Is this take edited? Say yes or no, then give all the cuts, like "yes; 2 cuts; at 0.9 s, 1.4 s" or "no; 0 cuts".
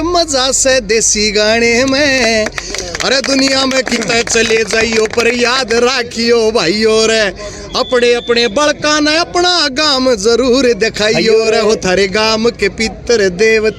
no; 0 cuts